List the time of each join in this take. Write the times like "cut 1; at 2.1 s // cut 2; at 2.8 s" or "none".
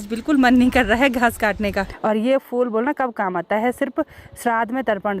cut 1; at 1.9 s

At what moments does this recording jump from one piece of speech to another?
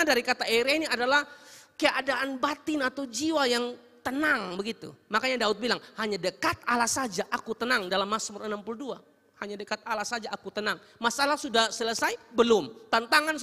none

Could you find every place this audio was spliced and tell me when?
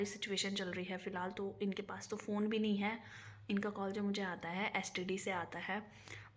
none

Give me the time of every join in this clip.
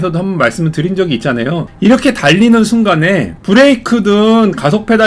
cut 1; at 1.6 s // cut 2; at 3.3 s

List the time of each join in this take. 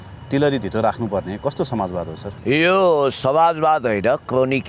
cut 1; at 2.2 s

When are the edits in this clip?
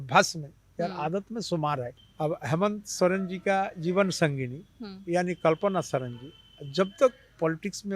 cut 1; at 2.0 s

